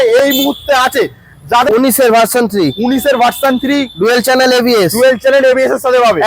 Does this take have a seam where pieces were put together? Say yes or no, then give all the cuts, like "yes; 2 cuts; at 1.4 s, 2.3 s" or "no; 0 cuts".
yes; 1 cut; at 1.7 s